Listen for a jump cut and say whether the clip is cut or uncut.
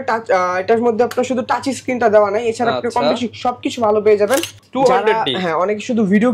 cut